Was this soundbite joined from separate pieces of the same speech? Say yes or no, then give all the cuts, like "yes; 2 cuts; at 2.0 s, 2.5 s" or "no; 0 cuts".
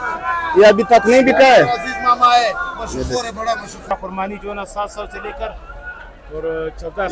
yes; 1 cut; at 3.8 s